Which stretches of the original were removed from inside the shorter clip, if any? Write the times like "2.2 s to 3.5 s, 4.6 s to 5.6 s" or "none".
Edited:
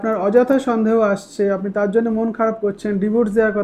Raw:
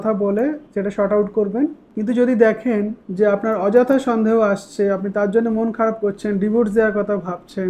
none